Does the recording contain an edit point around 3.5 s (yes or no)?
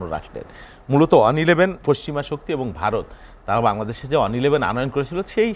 no